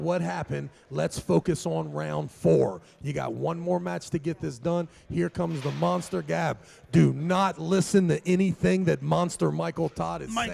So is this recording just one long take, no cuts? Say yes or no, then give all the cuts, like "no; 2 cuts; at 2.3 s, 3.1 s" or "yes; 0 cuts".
yes; 0 cuts